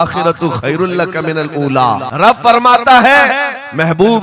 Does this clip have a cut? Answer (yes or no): yes